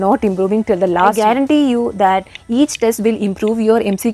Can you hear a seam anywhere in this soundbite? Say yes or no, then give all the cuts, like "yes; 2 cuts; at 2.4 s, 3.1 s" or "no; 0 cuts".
yes; 1 cut; at 1.2 s